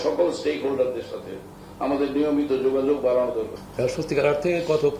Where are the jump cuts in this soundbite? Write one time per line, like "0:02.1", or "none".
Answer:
0:03.6